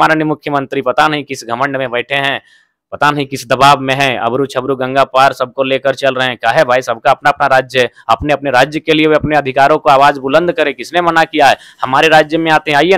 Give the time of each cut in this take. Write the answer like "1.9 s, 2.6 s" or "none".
none